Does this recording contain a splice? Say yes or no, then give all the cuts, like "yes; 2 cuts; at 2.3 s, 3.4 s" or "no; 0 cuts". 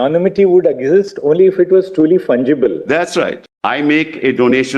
yes; 1 cut; at 3.4 s